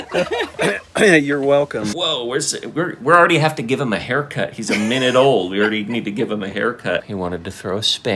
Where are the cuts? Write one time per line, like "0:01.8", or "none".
0:01.9
0:07.0